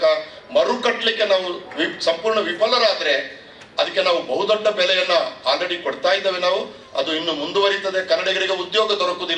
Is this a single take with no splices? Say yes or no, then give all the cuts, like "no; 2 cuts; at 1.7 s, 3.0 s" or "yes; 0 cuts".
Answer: yes; 0 cuts